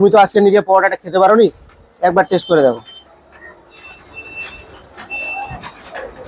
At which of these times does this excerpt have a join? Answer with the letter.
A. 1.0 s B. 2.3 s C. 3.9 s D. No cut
D